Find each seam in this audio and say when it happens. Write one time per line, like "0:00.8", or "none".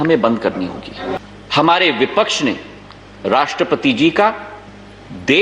0:01.2